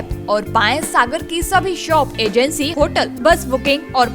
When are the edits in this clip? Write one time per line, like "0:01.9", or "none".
0:02.9